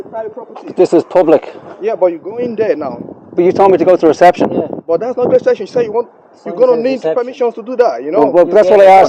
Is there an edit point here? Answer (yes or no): no